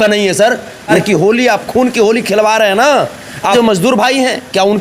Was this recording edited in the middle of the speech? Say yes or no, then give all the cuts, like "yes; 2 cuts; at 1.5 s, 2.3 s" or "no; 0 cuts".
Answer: yes; 2 cuts; at 1.0 s, 3.5 s